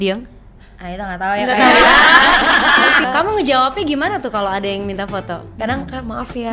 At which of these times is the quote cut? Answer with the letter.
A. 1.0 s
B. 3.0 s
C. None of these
B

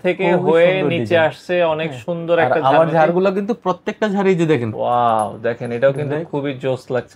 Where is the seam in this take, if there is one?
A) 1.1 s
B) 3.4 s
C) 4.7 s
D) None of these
C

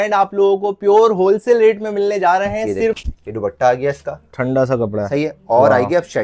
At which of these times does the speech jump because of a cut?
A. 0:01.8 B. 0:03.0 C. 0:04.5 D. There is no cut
B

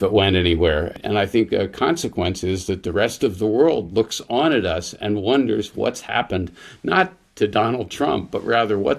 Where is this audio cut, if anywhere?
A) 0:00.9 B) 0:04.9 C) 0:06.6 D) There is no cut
A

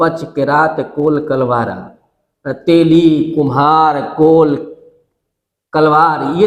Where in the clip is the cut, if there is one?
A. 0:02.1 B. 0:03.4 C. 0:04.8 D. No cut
D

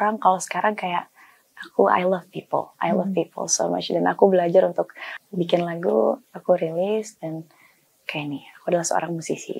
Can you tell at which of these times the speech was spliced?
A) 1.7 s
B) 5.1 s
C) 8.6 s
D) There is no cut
B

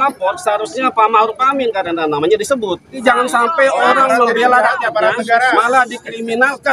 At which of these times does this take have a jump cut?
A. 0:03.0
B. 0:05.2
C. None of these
A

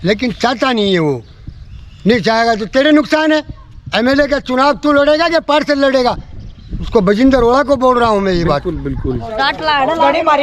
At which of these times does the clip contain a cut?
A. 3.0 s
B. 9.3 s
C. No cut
B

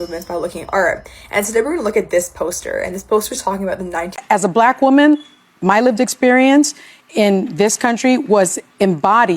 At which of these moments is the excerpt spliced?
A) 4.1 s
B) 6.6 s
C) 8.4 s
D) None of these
A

